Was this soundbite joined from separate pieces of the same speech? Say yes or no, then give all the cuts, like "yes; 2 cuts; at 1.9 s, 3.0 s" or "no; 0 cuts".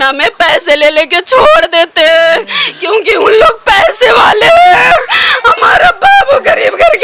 no; 0 cuts